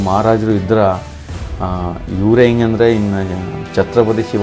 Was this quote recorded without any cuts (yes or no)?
yes